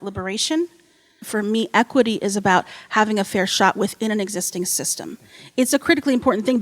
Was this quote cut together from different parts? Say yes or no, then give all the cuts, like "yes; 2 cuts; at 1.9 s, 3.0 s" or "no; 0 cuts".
yes; 1 cut; at 1.3 s